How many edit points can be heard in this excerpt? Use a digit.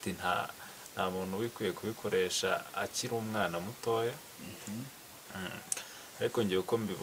0